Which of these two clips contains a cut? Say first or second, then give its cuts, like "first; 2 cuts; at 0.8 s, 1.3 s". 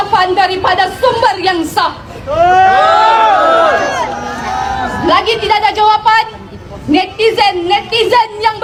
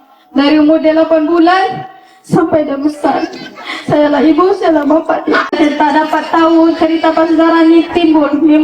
second; 1 cut; at 5.6 s